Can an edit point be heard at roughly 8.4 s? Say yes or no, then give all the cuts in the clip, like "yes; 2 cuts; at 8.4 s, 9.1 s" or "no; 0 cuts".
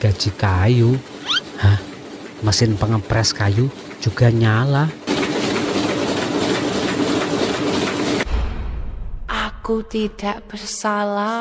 yes; 1 cut; at 8.4 s